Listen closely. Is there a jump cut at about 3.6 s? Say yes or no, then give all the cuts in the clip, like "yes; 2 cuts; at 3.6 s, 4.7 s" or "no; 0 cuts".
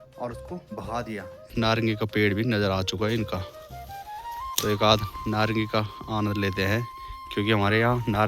no; 1 cut; at 1.5 s